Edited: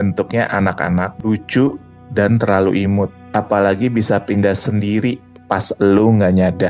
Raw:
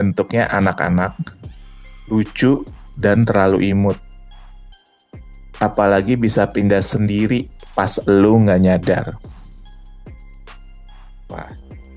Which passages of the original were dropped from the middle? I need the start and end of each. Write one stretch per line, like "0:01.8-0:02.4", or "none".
0:01.1-0:02.0
0:04.1-0:05.5